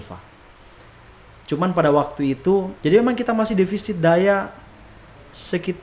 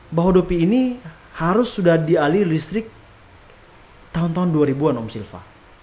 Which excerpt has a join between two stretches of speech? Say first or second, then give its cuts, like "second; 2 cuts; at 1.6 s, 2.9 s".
first; 1 cut; at 2.7 s